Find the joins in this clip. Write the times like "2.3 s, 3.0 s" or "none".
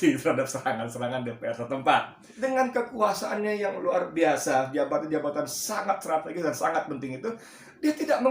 2.3 s